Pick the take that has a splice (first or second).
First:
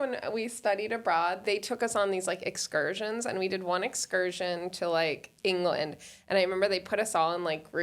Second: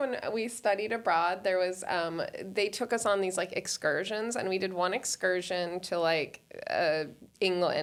first